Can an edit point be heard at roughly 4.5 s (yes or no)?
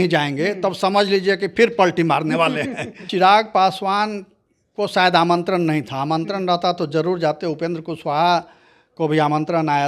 no